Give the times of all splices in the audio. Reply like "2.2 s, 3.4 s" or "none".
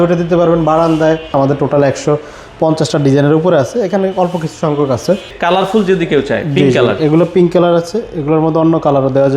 1.3 s, 5.3 s